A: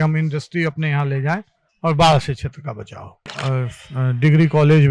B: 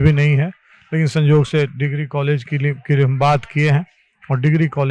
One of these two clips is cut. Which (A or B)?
A